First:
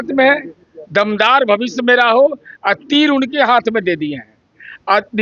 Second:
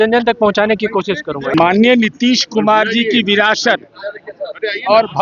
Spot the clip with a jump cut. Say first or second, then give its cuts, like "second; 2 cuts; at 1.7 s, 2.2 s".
second; 1 cut; at 1.5 s